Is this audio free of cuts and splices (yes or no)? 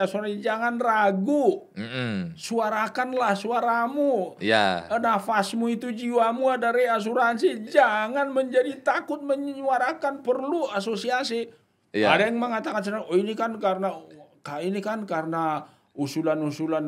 yes